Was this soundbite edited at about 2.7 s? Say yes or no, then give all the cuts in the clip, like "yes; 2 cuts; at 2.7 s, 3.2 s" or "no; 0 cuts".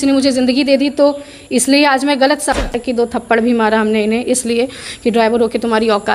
yes; 1 cut; at 2.7 s